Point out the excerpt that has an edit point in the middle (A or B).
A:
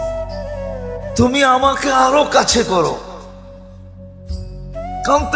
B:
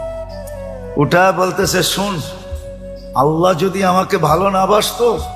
A